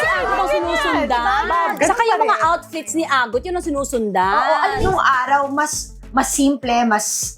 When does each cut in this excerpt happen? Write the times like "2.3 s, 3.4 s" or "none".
1.7 s, 4.8 s